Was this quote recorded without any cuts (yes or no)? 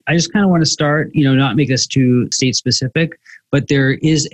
no